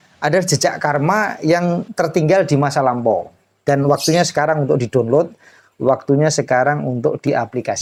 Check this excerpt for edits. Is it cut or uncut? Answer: uncut